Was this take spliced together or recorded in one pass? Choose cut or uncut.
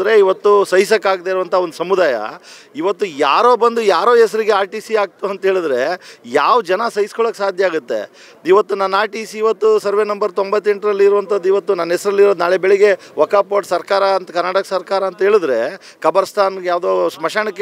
uncut